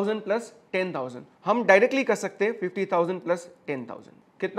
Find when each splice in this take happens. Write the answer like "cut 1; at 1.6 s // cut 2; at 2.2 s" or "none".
cut 1; at 1.2 s